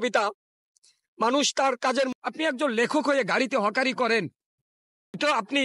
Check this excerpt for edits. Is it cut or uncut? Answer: cut